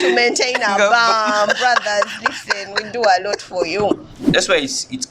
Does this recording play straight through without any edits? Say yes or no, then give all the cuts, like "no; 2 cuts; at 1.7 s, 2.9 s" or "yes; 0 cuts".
no; 1 cut; at 4.1 s